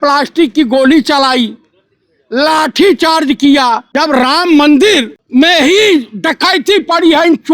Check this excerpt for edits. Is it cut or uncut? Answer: cut